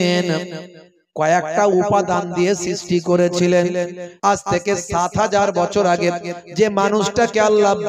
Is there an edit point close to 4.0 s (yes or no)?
yes